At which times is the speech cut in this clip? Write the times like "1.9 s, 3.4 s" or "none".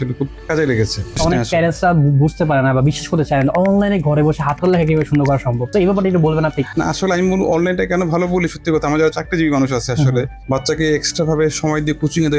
1.2 s, 5.7 s